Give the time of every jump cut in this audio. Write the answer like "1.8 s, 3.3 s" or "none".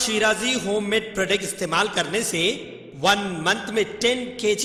none